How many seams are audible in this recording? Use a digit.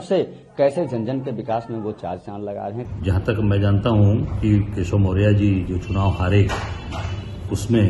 1